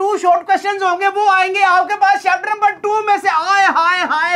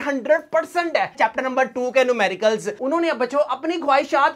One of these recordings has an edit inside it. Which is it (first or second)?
second